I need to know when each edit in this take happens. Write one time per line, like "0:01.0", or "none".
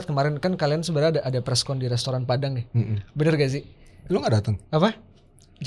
none